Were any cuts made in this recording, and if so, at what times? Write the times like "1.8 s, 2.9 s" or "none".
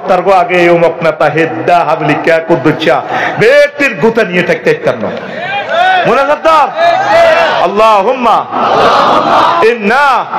none